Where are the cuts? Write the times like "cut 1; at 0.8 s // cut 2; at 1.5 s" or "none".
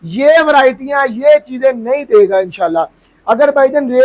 none